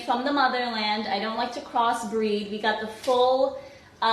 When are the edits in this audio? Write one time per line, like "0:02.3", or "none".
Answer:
0:01.2

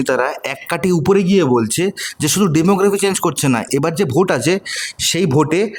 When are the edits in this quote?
none

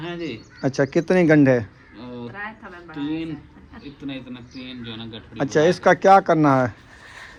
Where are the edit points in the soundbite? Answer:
none

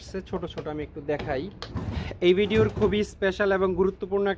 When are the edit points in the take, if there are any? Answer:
0:01.6

